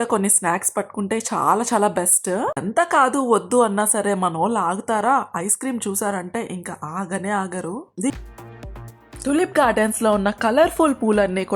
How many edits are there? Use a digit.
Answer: 2